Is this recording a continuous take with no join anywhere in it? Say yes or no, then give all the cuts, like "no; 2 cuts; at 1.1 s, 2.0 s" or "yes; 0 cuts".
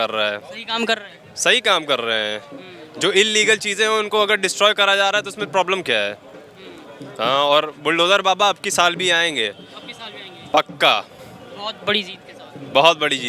yes; 0 cuts